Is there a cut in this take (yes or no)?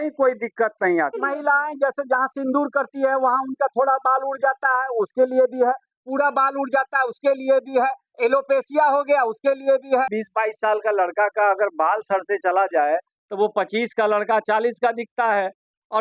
yes